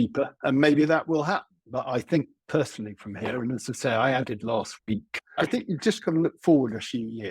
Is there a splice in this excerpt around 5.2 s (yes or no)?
yes